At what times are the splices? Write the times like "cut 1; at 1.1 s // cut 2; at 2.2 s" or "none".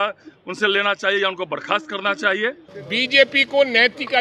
cut 1; at 2.7 s